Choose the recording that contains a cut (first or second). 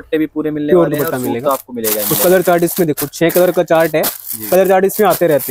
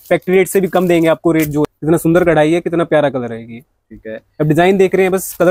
second